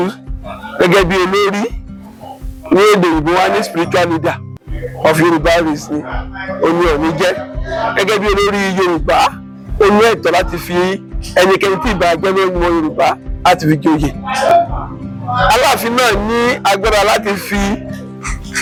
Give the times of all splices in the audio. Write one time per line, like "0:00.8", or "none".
none

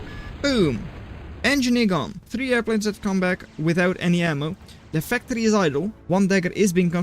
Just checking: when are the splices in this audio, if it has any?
0:02.2
0:06.0

